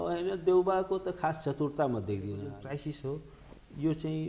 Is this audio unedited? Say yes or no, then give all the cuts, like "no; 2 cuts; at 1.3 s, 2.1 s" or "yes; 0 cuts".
no; 1 cut; at 2.5 s